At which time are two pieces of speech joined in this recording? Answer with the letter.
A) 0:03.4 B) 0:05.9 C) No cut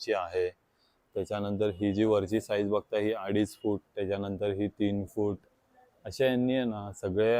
C